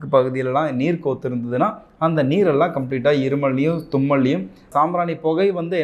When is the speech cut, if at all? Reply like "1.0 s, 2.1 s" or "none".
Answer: 4.6 s